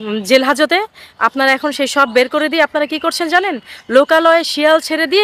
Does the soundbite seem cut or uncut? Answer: uncut